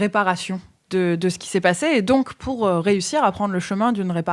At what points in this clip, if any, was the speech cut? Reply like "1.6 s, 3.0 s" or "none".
2.4 s